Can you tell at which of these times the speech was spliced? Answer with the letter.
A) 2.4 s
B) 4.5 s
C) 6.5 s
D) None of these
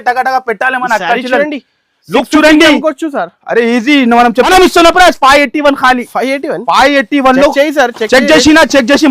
B